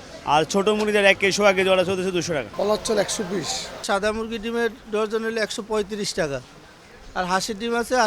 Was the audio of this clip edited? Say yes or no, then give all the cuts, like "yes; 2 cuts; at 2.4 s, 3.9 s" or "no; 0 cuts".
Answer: yes; 2 cuts; at 2.5 s, 3.8 s